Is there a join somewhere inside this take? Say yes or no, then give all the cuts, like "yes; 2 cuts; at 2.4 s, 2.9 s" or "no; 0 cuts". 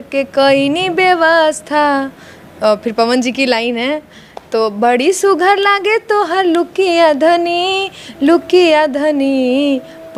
no; 0 cuts